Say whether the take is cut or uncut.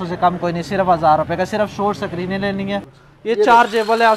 cut